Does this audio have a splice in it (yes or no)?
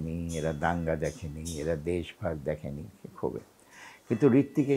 no